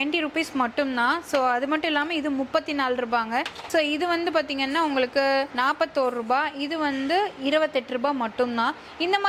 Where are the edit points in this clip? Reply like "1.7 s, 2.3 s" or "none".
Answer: none